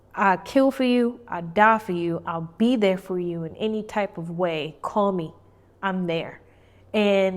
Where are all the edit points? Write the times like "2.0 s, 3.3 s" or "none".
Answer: none